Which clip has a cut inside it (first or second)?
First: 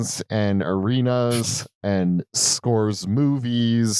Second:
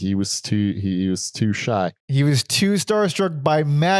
second